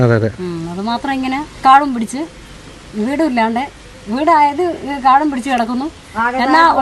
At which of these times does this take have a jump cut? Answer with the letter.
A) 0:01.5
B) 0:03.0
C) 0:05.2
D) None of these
A